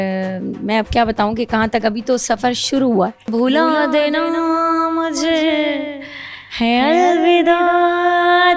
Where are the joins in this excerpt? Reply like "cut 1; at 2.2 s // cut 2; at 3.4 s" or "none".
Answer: cut 1; at 3.3 s